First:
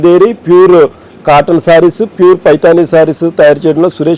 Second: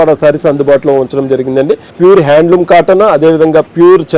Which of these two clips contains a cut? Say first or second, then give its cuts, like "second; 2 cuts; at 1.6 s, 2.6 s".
second; 1 cut; at 1.8 s